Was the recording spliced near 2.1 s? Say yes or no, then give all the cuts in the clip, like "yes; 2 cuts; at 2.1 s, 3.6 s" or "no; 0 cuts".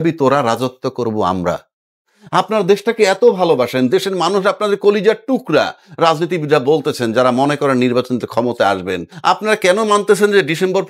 yes; 2 cuts; at 2.1 s, 9.1 s